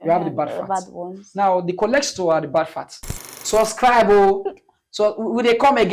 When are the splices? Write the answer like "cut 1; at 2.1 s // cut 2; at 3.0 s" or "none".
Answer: cut 1; at 3.3 s

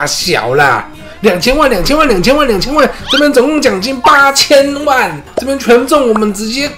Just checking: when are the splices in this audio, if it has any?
cut 1; at 3.0 s

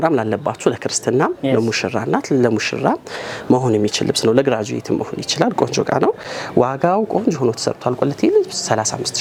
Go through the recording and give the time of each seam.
none

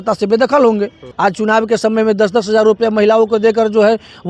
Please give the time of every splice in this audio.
cut 1; at 1.0 s

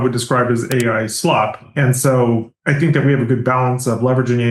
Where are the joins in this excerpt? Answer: cut 1; at 1.6 s

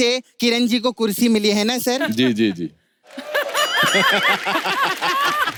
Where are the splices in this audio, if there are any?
none

